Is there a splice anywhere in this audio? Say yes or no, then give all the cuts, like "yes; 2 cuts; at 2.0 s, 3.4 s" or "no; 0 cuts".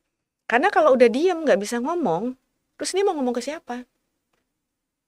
no; 0 cuts